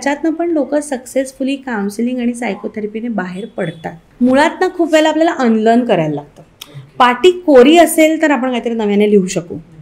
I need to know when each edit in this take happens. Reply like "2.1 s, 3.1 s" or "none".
4.0 s

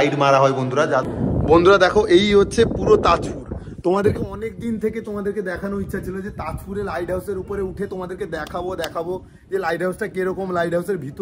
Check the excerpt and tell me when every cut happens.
1.0 s

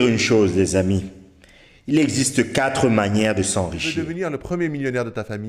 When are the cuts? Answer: 3.9 s

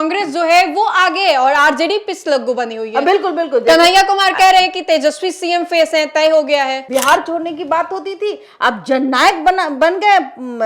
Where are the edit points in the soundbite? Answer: 6.8 s

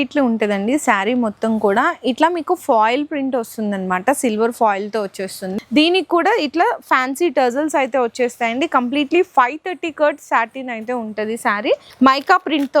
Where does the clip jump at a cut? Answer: 5.5 s, 11.9 s

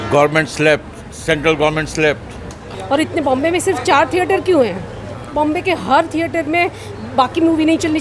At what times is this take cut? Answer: 2.6 s, 5.3 s

